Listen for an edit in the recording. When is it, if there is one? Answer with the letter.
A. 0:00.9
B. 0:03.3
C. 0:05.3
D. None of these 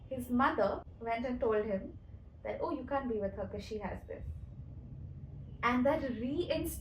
A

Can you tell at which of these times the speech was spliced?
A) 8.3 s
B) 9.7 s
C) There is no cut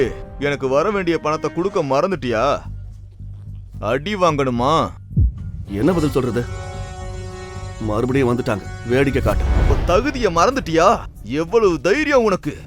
B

